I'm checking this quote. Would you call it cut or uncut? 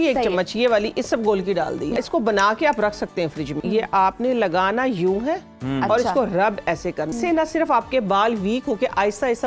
cut